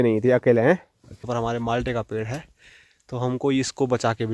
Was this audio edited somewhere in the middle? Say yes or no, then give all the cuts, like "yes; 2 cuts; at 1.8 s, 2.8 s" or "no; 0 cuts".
yes; 1 cut; at 1.2 s